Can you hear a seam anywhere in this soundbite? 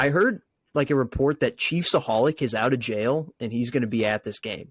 no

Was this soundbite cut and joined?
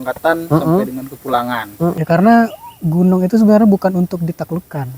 yes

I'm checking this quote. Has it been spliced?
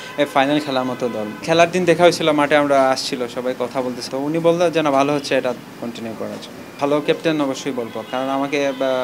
yes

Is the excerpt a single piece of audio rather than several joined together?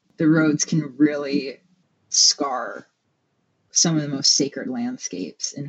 yes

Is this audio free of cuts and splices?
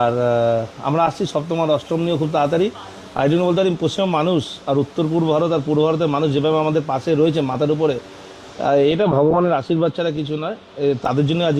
yes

